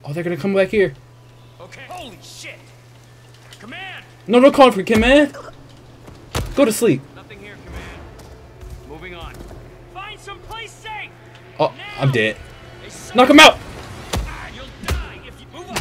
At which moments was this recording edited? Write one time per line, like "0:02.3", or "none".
none